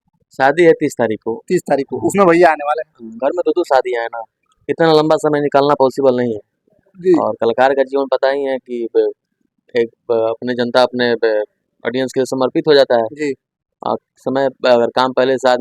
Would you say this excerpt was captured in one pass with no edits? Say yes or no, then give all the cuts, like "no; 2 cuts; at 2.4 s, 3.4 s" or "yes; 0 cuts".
yes; 0 cuts